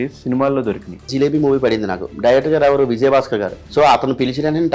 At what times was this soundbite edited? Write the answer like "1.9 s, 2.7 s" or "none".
1.1 s, 3.6 s